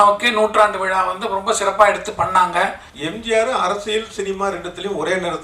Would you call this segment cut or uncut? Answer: uncut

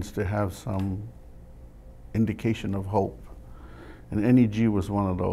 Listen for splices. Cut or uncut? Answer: uncut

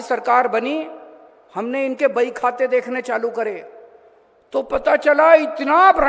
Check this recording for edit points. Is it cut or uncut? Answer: uncut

